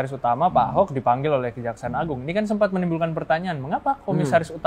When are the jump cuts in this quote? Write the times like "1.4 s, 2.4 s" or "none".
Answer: none